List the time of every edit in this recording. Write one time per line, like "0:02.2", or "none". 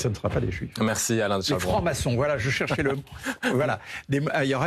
none